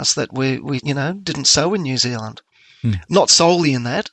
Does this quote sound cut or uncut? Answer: uncut